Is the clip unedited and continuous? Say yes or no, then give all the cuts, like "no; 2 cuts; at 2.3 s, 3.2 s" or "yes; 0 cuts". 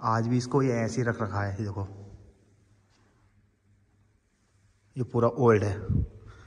yes; 0 cuts